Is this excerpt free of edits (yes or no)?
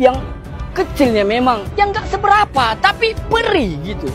no